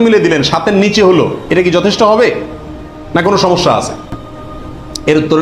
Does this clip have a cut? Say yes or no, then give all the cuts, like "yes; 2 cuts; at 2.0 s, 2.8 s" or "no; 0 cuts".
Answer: no; 0 cuts